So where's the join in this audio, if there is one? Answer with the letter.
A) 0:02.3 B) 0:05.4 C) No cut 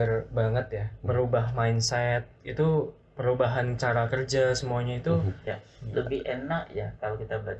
B